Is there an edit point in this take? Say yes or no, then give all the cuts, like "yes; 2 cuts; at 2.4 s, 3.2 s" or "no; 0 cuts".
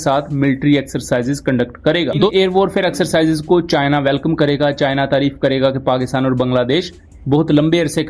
yes; 1 cut; at 2.3 s